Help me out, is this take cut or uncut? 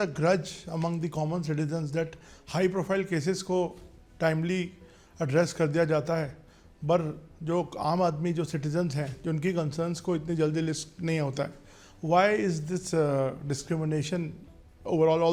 uncut